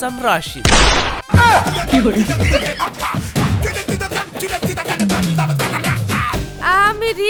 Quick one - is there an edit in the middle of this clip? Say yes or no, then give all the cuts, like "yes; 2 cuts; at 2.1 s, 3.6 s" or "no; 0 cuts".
no; 0 cuts